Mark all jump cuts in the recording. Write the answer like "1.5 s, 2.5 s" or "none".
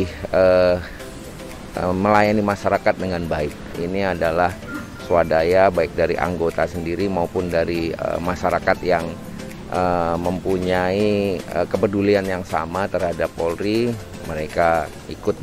none